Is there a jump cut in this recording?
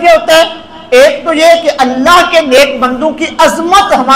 no; 0 cuts

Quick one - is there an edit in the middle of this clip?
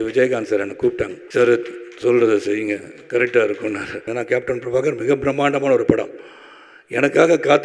yes; 2 cuts; at 1.2 s, 4.1 s

